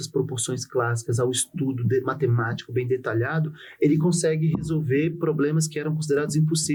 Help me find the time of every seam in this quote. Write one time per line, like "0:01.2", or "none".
none

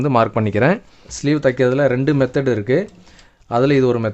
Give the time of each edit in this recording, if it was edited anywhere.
0:01.1

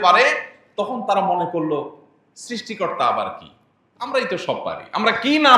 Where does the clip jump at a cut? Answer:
none

